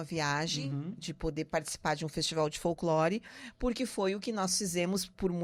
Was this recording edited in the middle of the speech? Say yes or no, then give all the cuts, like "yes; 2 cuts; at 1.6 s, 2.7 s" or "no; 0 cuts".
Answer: no; 0 cuts